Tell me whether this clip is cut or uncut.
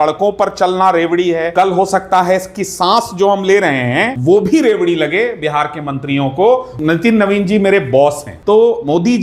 cut